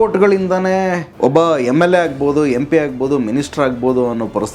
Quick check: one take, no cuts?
no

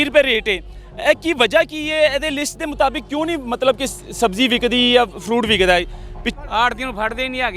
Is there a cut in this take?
yes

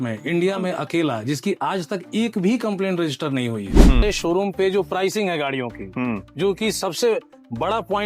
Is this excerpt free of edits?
no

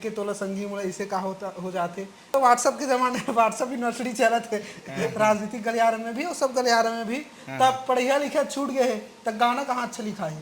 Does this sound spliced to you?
yes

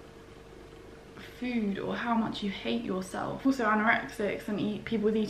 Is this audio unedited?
no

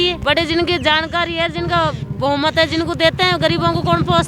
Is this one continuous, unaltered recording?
yes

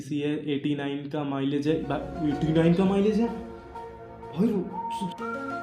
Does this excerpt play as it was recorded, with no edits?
yes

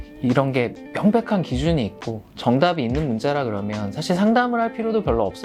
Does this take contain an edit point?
no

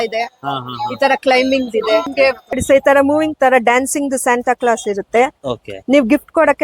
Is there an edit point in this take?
yes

